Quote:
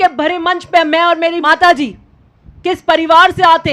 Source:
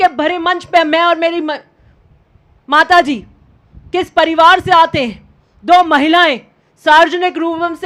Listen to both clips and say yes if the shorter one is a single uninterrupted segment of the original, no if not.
no